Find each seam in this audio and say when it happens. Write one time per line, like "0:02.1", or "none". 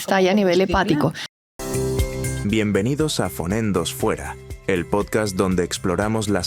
0:01.4